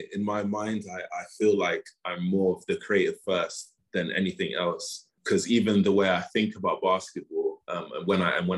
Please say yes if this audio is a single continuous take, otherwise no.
yes